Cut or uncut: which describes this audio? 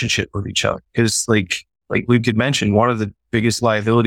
uncut